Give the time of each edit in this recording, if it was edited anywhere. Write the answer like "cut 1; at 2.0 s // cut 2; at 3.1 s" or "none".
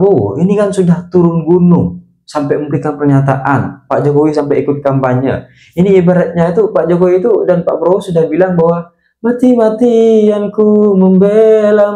none